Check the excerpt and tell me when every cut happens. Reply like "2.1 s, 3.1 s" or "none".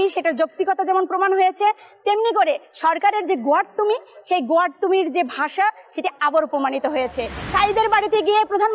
7.4 s